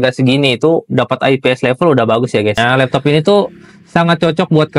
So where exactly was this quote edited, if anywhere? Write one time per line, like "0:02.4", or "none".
0:02.6